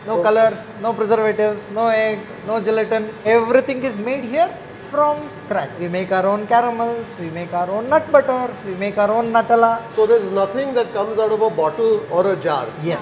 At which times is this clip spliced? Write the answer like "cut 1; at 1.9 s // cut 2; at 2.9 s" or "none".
cut 1; at 3.2 s // cut 2; at 5.7 s // cut 3; at 9.9 s